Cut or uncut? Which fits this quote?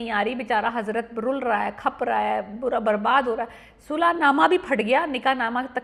uncut